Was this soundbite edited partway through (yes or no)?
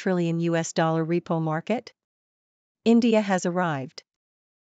yes